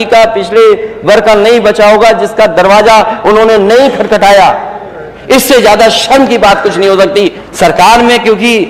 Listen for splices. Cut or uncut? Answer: cut